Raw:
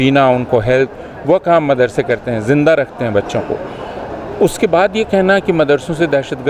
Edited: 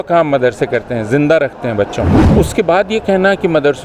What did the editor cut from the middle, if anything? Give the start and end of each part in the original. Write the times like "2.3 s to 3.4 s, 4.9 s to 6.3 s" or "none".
3.6 s to 4.3 s